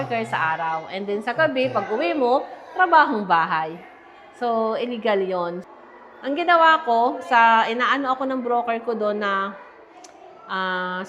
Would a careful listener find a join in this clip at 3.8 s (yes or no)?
no